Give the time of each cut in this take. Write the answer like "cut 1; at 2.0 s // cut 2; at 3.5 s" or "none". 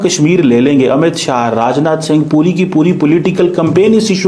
none

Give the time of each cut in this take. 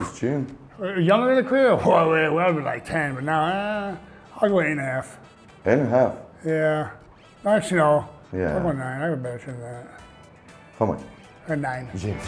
none

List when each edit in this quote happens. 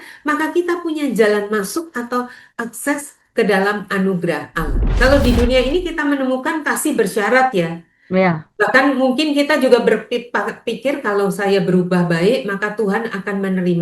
cut 1; at 4.9 s

